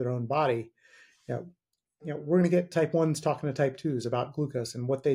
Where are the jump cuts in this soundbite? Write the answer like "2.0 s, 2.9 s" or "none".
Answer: none